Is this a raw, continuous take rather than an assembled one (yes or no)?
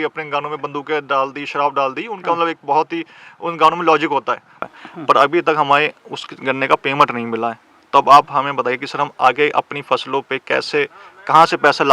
no